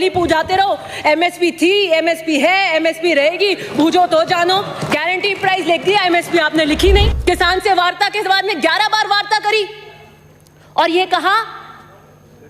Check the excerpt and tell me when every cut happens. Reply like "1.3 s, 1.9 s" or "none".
7.1 s